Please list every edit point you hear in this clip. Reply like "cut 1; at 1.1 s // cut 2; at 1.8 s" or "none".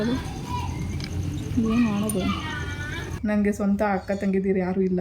cut 1; at 3.2 s

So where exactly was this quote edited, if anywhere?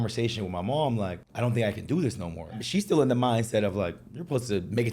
cut 1; at 1.2 s // cut 2; at 2.6 s

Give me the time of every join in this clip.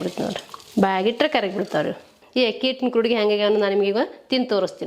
cut 1; at 2.2 s

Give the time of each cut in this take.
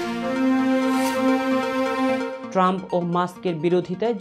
none

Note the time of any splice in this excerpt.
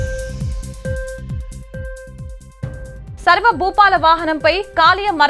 cut 1; at 2.0 s

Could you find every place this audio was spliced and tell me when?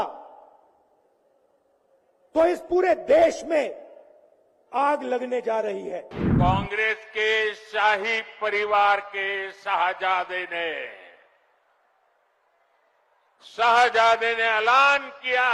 cut 1; at 6.2 s

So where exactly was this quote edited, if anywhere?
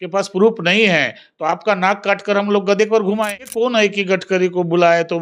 cut 1; at 3.4 s

